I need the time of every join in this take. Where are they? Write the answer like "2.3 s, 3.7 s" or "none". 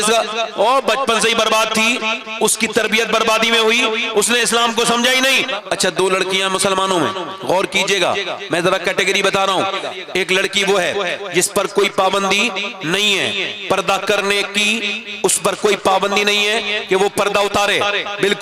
5.5 s, 9.8 s